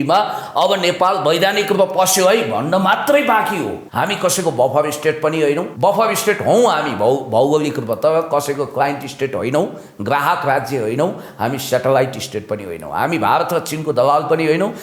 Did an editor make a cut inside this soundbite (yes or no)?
yes